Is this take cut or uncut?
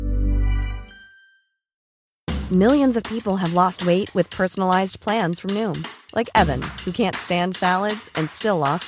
cut